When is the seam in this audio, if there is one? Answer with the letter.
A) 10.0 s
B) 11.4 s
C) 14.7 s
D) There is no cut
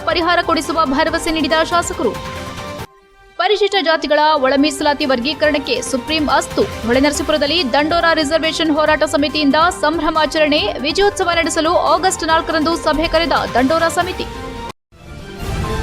C